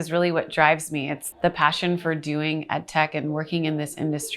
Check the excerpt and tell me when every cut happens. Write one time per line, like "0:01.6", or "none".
0:01.2